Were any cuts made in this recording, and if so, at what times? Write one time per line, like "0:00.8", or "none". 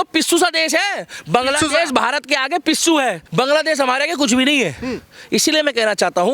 0:03.2